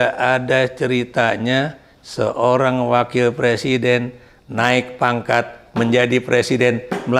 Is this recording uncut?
yes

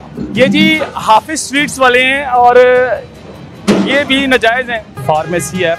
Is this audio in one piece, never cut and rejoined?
no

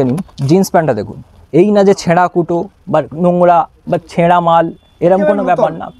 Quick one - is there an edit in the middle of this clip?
yes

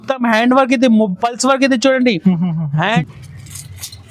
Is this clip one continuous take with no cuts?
no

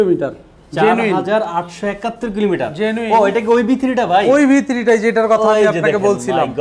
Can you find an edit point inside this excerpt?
no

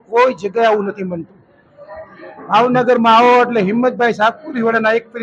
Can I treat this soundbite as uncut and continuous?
yes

